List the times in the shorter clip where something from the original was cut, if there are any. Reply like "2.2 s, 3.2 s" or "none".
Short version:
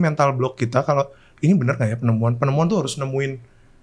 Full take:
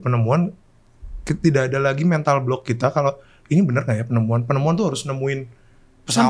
none

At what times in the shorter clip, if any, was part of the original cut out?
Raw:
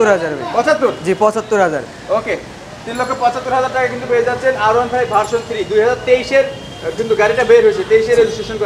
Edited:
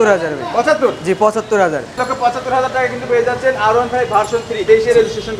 1.9 s, 4.6 s

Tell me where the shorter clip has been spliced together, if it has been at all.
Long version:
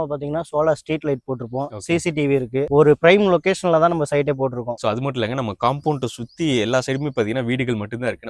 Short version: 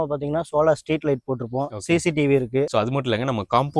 2.7 s

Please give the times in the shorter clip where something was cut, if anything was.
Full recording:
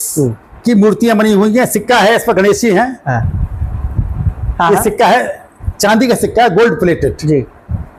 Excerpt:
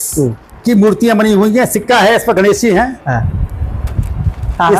none

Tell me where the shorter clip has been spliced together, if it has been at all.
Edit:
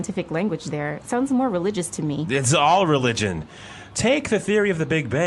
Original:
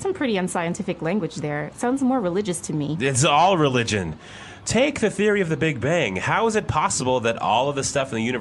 none

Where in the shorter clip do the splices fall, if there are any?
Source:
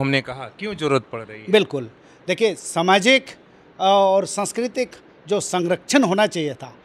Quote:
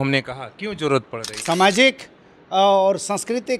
1.4 s

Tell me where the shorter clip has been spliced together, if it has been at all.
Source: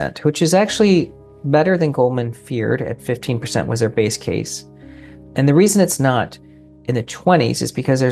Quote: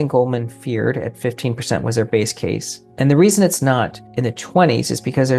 2.8 s, 4.0 s

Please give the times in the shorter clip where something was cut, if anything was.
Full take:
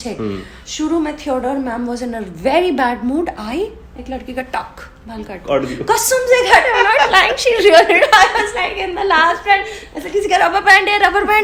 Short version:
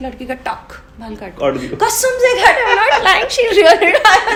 none

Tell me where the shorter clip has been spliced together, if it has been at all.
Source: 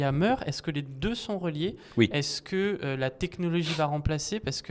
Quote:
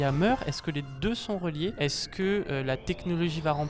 1.8 s

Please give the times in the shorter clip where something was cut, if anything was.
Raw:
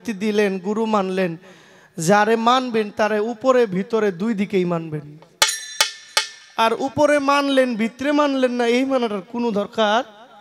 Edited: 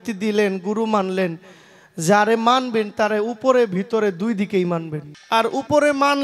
5.1 s

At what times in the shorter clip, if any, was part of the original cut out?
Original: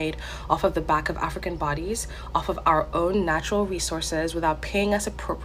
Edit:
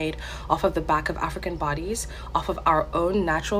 none

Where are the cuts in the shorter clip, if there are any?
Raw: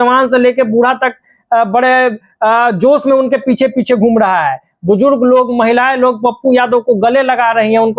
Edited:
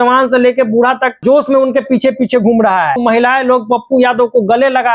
1.2 s, 3.0 s

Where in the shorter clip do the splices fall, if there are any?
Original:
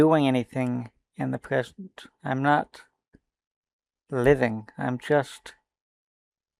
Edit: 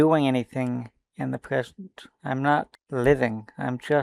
2.8 s

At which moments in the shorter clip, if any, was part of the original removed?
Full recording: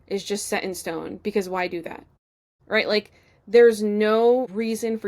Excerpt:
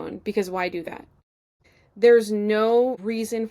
1.6 s

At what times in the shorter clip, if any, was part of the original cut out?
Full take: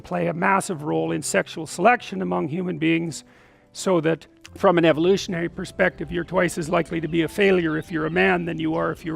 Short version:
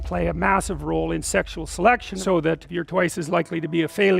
2.4 s

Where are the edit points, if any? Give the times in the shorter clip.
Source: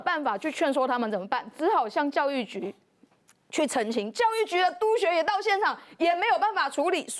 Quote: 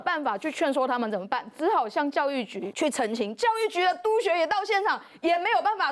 2.7 s

